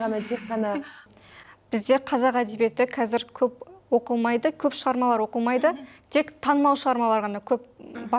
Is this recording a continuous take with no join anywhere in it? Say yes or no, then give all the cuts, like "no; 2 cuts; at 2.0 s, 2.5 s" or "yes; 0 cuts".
no; 1 cut; at 1.0 s